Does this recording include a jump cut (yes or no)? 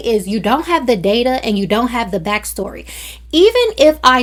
no